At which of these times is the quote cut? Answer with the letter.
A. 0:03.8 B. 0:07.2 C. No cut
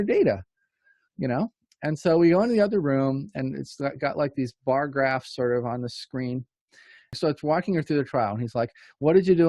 B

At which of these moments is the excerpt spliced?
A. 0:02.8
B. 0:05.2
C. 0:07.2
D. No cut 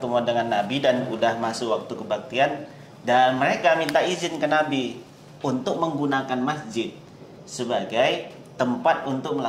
D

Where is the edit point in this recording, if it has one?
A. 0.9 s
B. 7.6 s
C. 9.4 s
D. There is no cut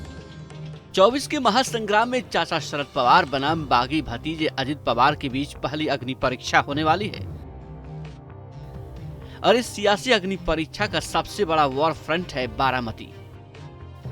A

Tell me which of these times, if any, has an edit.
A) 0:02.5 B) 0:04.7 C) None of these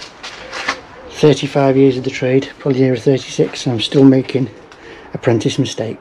C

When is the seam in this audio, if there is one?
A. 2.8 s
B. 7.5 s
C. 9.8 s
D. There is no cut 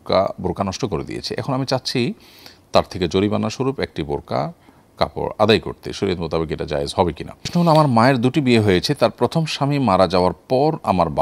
B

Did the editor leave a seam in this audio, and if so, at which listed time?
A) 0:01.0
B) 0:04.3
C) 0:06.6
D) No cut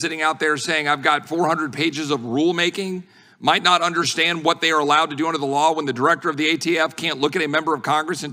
D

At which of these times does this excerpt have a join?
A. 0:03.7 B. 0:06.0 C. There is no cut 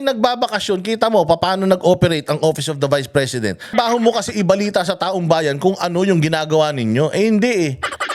A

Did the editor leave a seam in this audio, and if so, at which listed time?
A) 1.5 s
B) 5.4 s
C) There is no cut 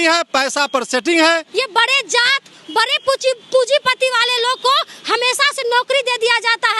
A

